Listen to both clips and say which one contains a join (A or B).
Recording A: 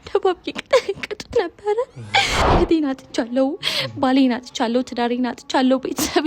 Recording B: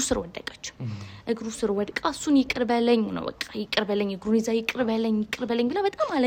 A